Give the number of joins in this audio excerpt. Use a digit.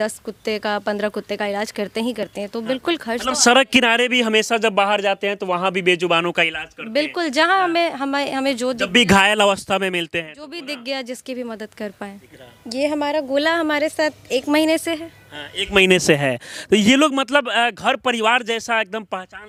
0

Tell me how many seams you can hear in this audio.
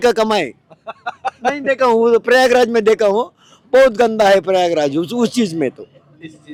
0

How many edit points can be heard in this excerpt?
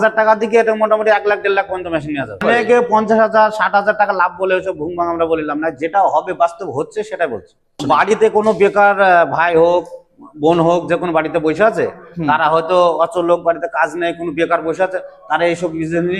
2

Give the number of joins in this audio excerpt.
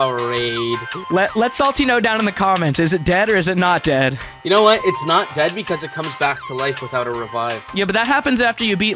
3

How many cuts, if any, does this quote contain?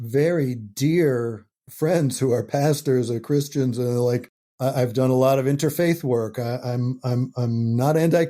1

